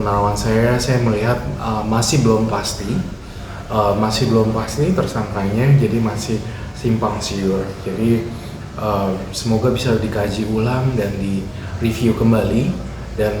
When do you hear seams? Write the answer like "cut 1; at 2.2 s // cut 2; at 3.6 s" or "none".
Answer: none